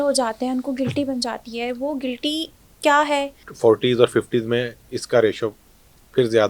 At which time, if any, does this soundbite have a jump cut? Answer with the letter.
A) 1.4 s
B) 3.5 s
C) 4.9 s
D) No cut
B